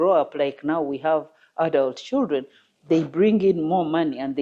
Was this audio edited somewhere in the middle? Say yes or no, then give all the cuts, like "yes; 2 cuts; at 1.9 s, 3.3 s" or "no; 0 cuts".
no; 0 cuts